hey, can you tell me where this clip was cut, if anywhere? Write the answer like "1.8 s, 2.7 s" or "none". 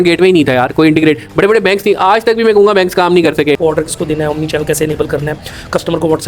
3.6 s